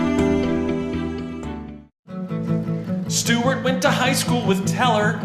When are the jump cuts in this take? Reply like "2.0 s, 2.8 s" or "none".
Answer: none